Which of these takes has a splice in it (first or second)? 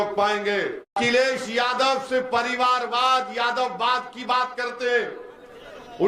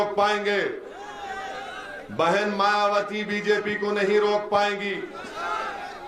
first